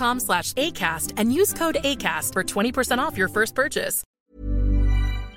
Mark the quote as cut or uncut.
cut